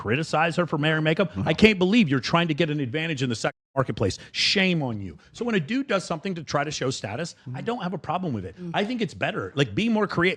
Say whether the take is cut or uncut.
uncut